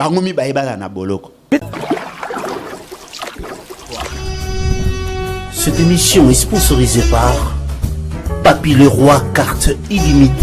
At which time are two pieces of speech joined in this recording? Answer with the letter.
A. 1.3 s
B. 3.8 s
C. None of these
A